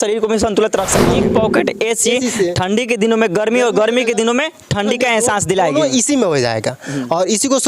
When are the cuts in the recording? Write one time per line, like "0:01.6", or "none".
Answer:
0:01.2